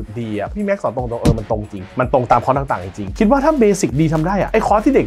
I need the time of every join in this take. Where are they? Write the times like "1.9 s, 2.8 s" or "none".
3.0 s